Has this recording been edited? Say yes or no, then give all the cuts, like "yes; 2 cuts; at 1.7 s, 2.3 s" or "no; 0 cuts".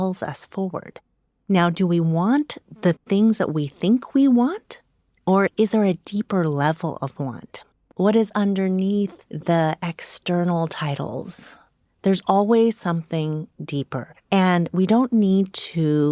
yes; 1 cut; at 7.8 s